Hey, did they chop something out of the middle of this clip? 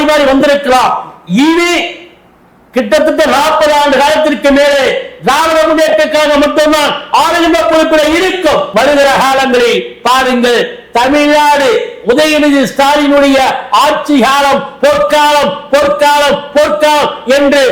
yes; 1 cut; at 8.7 s

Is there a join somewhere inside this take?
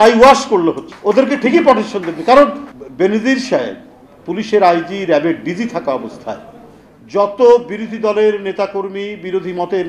yes; 2 cuts; at 0.9 s, 2.7 s

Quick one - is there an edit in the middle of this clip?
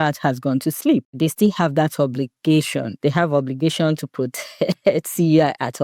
yes; 2 cuts; at 1.2 s, 2.8 s

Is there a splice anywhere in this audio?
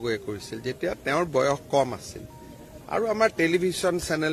no; 0 cuts

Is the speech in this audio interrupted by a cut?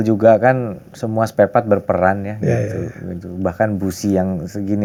no; 0 cuts

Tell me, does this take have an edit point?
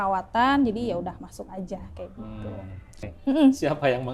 yes; 1 cut; at 3.1 s

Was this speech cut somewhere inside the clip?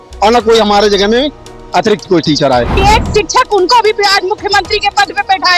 yes; 1 cut; at 2.7 s

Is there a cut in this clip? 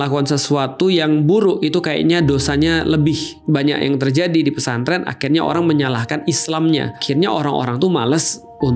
yes; 2 cuts; at 3.4 s, 7.0 s

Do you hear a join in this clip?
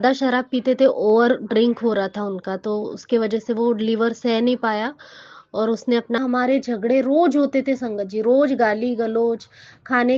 yes; 1 cut; at 6.2 s

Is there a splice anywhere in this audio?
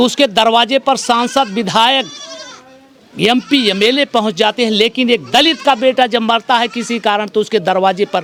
no; 0 cuts

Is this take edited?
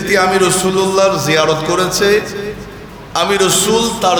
no; 0 cuts

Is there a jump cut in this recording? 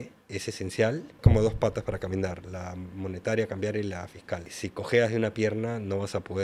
no; 0 cuts

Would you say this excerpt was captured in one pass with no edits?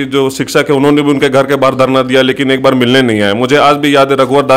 yes; 0 cuts

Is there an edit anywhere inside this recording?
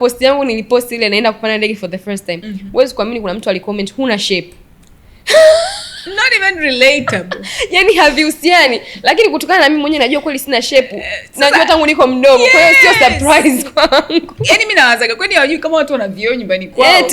no; 0 cuts

